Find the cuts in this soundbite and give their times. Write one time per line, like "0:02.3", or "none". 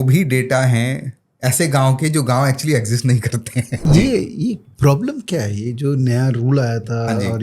0:03.8